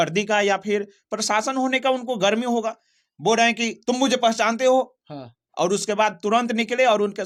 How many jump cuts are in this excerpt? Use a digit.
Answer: 0